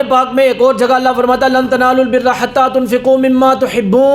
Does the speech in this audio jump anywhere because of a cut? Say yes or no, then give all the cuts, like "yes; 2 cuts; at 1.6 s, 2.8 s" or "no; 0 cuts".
no; 0 cuts